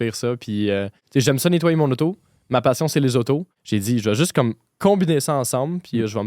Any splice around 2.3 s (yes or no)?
no